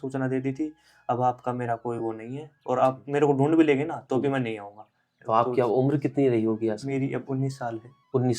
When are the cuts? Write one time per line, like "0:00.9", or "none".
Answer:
0:05.1